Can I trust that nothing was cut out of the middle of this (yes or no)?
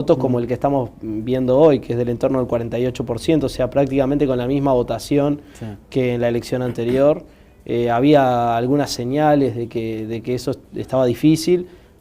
no